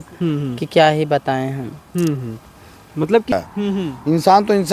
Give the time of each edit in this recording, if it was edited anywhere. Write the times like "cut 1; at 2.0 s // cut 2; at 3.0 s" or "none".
cut 1; at 3.3 s